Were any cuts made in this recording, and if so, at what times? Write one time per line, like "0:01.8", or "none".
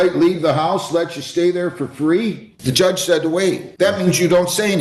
0:02.5
0:03.7